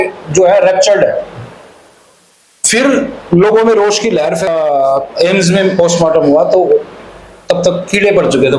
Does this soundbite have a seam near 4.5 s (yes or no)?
yes